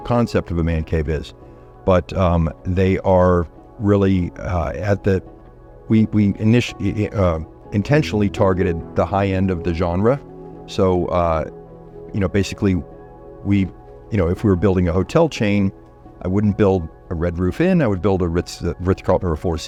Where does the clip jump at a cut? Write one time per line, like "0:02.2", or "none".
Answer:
none